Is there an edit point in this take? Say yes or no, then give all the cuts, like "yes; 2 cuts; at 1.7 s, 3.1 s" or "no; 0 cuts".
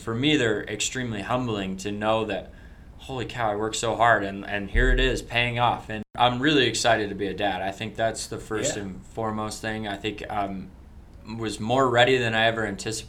yes; 1 cut; at 6.1 s